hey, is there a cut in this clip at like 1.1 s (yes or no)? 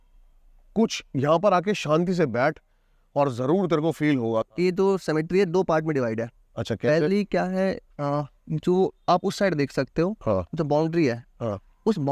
no